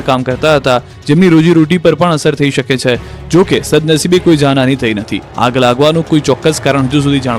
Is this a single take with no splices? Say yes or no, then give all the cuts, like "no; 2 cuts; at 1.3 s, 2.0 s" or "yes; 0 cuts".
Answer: no; 1 cut; at 0.9 s